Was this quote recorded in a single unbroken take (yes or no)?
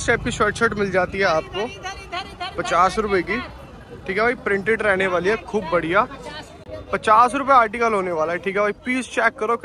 yes